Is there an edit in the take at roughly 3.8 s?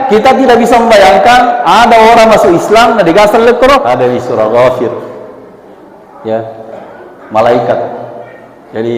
yes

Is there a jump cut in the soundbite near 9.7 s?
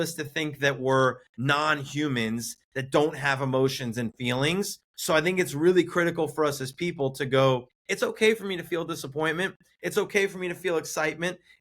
no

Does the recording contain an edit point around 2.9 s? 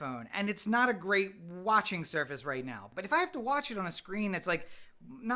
yes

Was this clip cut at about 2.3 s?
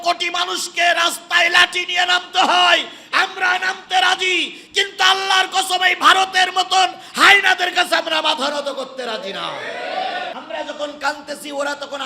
no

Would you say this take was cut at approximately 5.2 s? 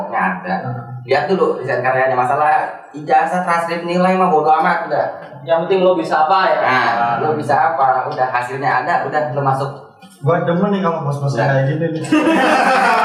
no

